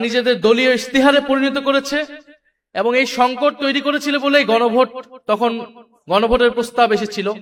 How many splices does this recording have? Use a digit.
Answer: 0